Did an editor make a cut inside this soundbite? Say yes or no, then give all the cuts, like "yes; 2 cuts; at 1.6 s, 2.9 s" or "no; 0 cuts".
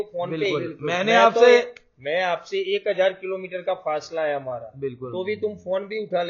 no; 0 cuts